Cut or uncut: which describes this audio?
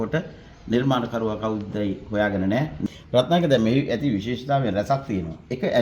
cut